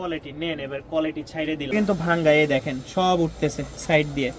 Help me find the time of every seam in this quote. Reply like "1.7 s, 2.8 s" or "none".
1.7 s

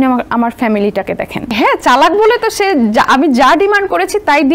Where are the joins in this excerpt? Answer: 1.5 s

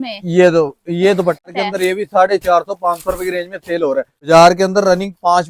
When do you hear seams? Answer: 1.5 s, 4.2 s

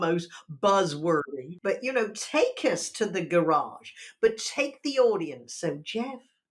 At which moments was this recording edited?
1.2 s

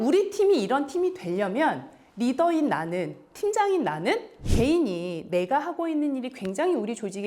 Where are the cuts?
4.4 s

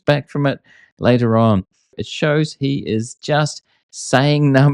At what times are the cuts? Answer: 2.0 s

